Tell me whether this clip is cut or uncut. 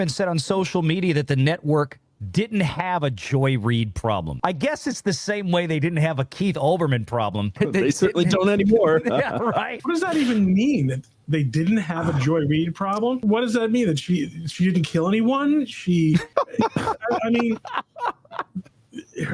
uncut